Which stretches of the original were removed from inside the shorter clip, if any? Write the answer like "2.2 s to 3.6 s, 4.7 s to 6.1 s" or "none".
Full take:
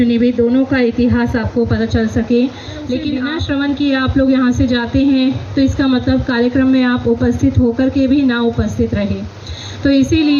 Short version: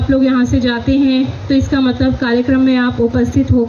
none